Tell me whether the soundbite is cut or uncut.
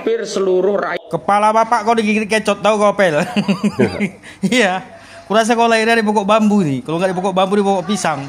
cut